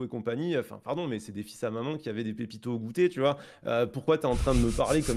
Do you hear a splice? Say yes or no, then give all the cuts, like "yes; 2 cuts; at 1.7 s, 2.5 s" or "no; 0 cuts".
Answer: no; 0 cuts